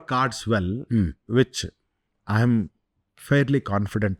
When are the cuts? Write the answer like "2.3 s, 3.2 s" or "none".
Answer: none